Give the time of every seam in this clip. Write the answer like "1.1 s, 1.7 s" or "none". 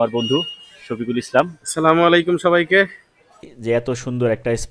3.5 s